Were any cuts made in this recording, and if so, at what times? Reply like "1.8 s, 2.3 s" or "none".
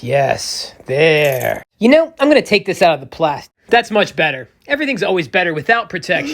1.6 s, 3.5 s